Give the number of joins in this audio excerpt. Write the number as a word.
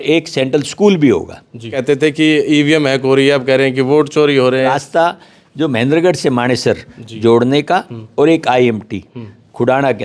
two